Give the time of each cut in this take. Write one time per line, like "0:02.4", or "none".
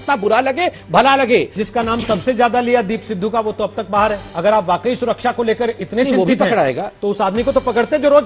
0:01.6
0:04.3